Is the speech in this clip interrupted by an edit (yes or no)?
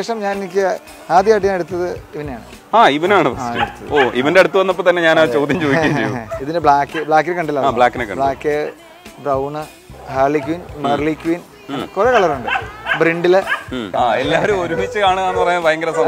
yes